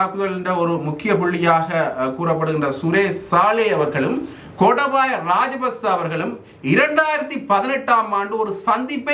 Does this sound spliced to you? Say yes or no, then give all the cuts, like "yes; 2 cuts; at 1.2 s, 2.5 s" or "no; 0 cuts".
no; 0 cuts